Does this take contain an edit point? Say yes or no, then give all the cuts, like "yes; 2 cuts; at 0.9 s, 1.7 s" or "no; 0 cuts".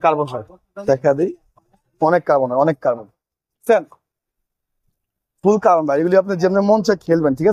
no; 0 cuts